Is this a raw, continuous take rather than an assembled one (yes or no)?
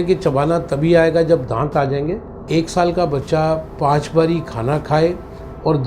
no